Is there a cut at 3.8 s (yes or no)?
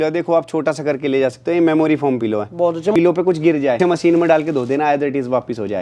yes